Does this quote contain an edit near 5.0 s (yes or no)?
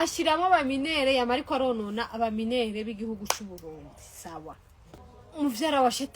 yes